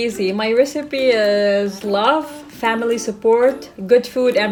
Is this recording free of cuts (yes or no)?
yes